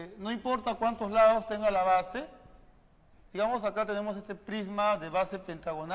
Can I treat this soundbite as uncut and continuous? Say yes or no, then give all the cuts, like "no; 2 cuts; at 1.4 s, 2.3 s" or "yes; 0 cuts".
no; 1 cut; at 1.5 s